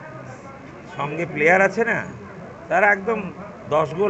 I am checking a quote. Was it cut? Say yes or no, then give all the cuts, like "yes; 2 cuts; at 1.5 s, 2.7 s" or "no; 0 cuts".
no; 0 cuts